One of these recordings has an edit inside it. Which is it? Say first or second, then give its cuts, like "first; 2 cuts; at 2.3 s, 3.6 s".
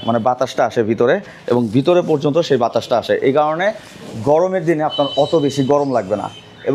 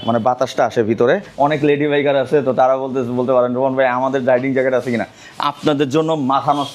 second; 1 cut; at 1.3 s